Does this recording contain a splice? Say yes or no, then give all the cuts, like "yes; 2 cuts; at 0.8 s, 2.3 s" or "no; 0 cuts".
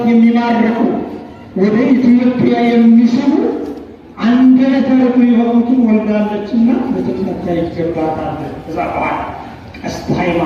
no; 0 cuts